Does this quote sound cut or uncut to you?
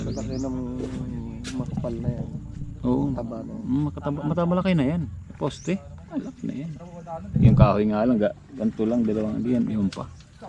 uncut